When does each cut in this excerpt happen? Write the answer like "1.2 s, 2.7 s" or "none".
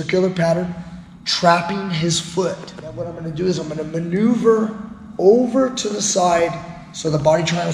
3.1 s